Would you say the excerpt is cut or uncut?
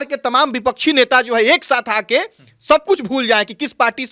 uncut